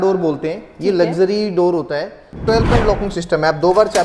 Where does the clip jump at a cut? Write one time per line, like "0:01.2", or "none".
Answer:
0:02.3

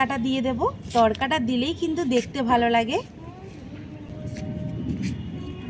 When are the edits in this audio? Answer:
0:04.1

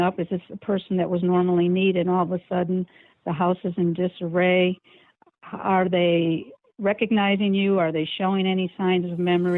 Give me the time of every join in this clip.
none

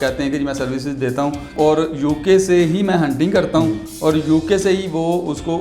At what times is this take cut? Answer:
0:01.5

